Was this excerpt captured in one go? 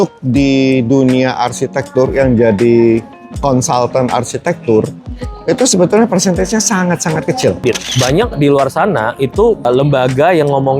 no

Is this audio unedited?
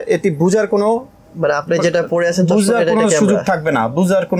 yes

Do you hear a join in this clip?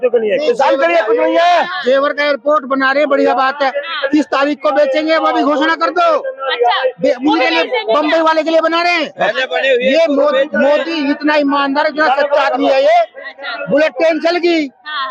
no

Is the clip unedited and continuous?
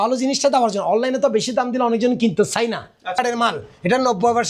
no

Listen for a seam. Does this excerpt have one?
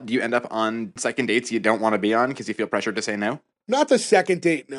yes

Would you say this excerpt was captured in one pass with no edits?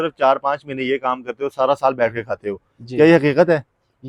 yes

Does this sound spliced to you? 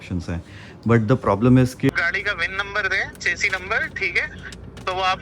yes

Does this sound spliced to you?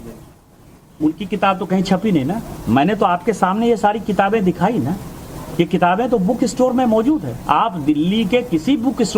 no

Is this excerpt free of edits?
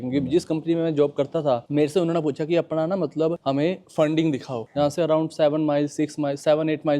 no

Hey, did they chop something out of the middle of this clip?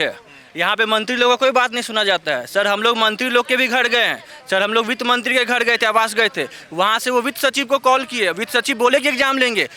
no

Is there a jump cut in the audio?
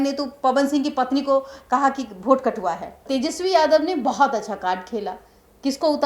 yes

